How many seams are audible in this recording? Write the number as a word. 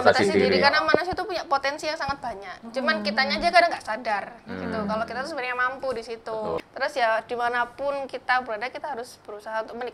one